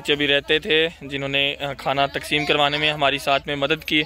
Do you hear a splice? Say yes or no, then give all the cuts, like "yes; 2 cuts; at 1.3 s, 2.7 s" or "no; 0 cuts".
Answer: no; 0 cuts